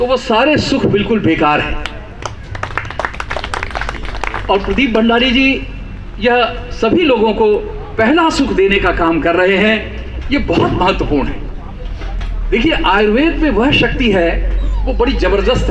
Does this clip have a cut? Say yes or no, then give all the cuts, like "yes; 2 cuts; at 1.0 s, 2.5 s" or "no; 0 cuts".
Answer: no; 0 cuts